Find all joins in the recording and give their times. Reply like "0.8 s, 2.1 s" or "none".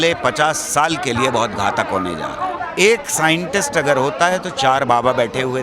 2.6 s